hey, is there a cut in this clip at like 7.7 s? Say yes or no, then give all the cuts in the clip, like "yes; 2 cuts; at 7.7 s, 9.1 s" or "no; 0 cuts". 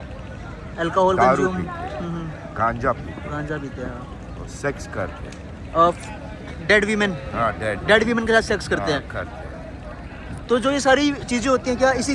no; 0 cuts